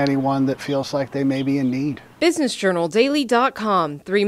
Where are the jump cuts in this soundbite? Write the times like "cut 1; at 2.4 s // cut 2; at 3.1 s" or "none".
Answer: cut 1; at 2.0 s